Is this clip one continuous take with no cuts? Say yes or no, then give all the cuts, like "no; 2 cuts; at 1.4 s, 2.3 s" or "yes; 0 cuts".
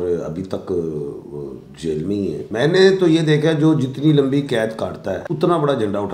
no; 2 cuts; at 2.4 s, 5.2 s